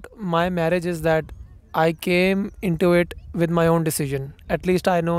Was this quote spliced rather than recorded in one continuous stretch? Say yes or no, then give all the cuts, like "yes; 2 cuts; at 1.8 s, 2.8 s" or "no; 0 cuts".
no; 0 cuts